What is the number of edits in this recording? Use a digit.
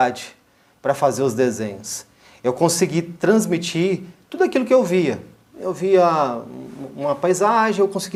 0